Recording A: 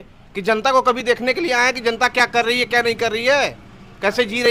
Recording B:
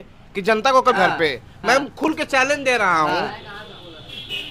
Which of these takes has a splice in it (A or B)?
B